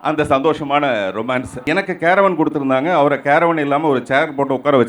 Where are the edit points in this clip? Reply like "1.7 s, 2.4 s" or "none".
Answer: 1.5 s